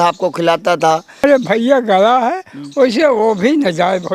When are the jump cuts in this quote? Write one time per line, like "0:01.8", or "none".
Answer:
0:01.2